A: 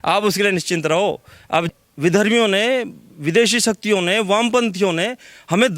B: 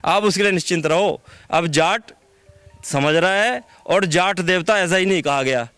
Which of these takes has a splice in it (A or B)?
A